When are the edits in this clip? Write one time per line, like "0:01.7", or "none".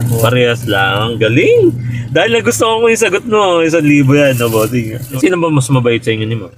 0:05.0